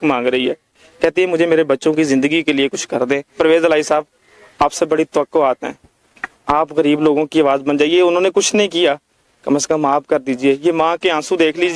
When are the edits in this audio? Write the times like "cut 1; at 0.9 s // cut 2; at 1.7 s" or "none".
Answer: none